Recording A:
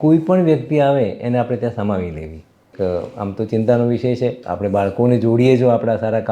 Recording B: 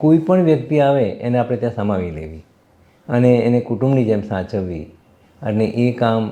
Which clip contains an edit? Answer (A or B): A